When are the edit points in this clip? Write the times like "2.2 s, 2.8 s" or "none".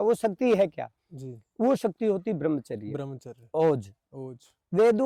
none